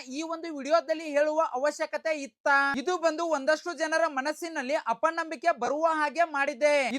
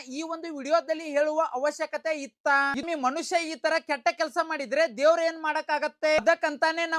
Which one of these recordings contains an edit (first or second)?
second